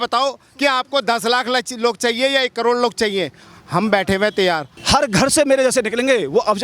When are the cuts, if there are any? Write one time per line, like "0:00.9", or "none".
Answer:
0:04.8